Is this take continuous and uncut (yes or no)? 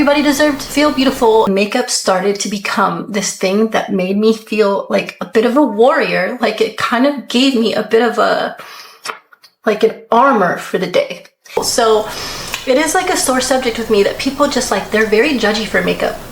no